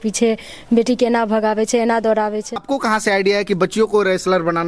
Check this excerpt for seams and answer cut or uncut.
cut